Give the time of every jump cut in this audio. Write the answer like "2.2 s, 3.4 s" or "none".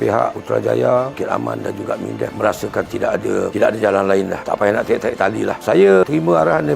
none